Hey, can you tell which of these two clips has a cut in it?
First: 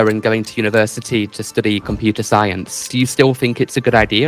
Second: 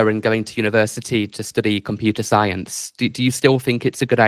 first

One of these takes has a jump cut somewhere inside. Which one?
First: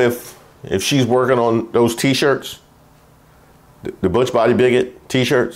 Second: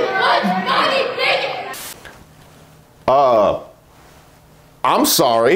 second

